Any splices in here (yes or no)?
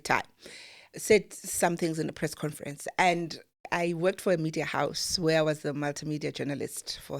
yes